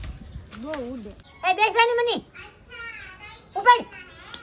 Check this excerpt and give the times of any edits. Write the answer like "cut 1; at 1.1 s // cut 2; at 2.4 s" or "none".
cut 1; at 1.2 s